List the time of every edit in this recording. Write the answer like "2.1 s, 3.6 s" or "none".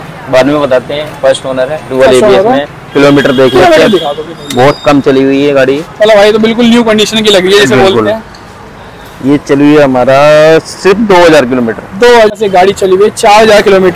12.3 s